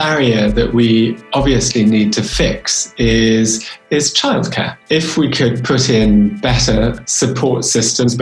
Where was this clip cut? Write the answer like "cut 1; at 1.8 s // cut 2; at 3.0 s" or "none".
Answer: cut 1; at 4.7 s